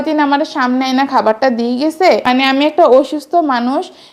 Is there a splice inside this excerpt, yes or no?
yes